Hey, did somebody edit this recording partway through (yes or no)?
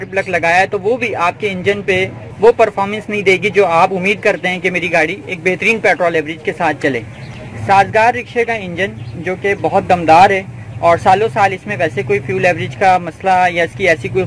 no